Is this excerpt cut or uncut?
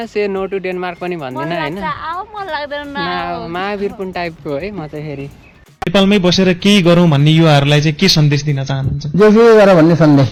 uncut